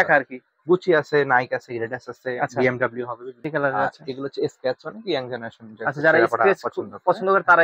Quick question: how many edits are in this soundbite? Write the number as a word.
one